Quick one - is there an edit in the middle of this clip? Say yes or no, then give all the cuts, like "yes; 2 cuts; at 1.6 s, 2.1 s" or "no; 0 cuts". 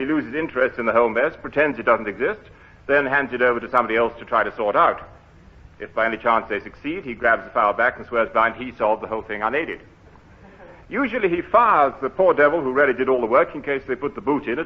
yes; 1 cut; at 11.1 s